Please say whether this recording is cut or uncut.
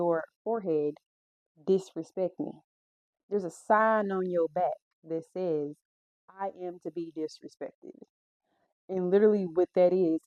uncut